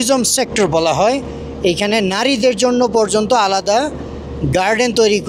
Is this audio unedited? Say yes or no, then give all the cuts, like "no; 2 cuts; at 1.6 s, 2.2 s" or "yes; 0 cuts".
yes; 0 cuts